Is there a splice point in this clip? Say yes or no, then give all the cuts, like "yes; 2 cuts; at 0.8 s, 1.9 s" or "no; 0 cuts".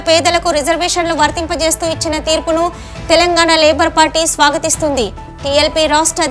no; 0 cuts